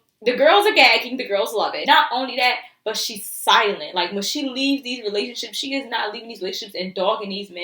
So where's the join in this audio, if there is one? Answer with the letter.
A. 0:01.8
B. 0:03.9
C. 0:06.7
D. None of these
A